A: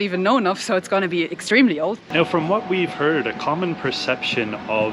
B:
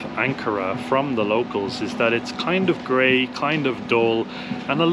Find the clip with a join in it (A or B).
A